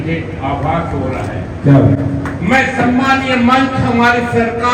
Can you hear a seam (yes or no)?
no